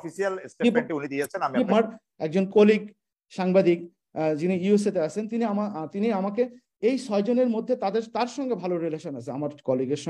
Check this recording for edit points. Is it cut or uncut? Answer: cut